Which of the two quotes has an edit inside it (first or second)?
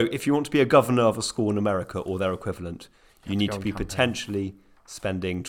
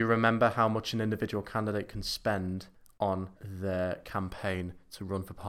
second